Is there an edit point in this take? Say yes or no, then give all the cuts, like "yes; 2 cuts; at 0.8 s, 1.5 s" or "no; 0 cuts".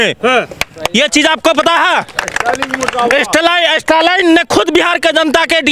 no; 0 cuts